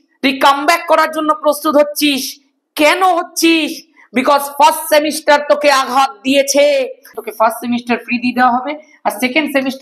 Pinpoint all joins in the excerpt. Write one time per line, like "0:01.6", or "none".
0:07.1